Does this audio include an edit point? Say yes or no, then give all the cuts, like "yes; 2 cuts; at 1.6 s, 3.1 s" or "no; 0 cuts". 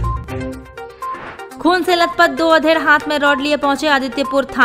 yes; 1 cut; at 1.0 s